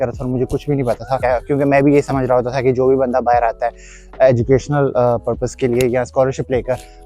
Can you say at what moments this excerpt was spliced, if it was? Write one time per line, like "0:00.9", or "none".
0:01.2